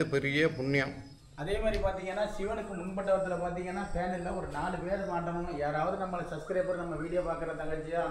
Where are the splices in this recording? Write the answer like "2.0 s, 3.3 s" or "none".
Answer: 1.3 s